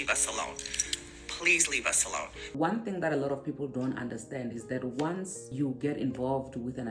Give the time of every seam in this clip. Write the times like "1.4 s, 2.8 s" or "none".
2.4 s, 5.5 s